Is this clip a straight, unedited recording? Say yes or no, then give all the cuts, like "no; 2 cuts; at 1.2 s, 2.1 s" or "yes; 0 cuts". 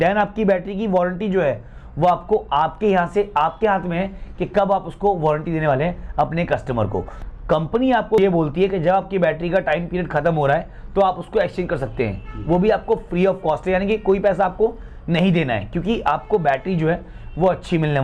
no; 1 cut; at 7.1 s